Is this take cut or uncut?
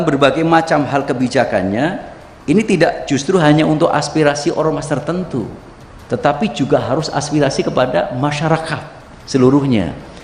uncut